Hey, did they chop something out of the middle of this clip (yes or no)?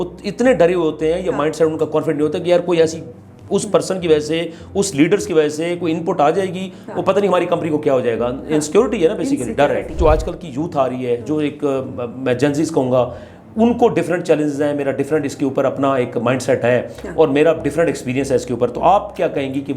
yes